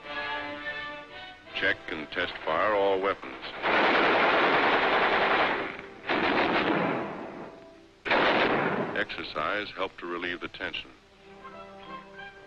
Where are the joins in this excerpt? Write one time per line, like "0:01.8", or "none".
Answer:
0:09.9